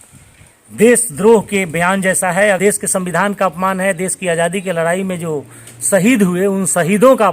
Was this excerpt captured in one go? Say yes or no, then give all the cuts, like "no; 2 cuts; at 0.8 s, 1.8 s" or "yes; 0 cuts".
no; 1 cut; at 2.6 s